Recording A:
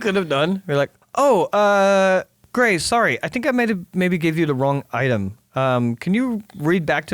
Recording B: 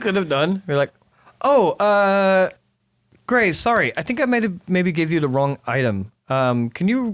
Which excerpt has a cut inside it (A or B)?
A